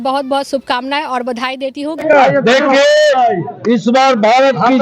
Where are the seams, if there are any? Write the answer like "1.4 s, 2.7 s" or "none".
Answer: 2.0 s